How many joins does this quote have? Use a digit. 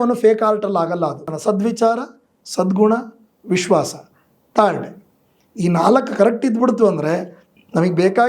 1